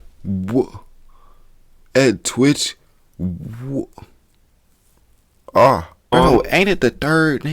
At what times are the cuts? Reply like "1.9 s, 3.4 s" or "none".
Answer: 6.1 s

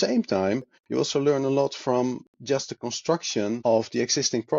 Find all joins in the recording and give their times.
3.6 s

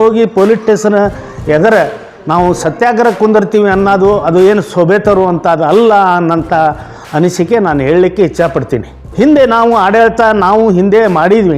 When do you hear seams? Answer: none

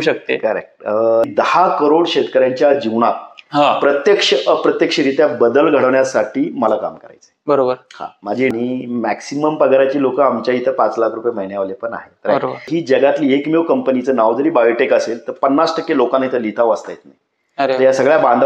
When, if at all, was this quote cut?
1.3 s, 8.5 s, 12.7 s

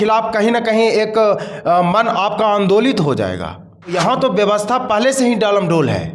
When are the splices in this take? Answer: 3.9 s

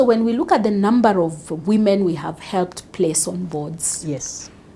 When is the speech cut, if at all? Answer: none

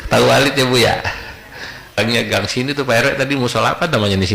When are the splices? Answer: 2.0 s

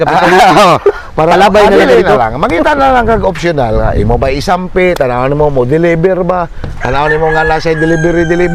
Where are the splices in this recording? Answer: none

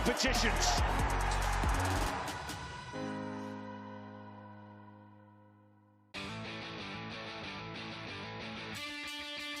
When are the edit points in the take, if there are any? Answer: 5.9 s

